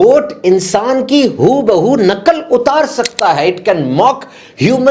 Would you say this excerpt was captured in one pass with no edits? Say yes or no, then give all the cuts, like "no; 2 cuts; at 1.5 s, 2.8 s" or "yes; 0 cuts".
yes; 0 cuts